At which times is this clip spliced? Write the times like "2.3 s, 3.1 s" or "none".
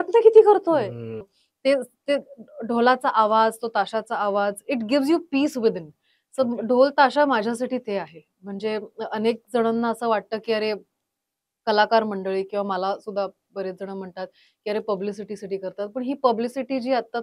1.2 s